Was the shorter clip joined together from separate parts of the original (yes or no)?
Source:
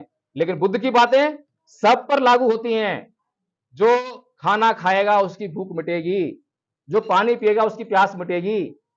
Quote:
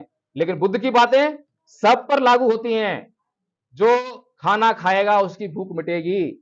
no